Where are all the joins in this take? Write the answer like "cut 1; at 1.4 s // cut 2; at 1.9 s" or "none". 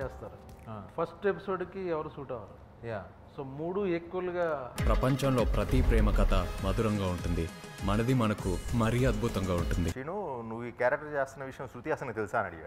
cut 1; at 4.7 s // cut 2; at 9.9 s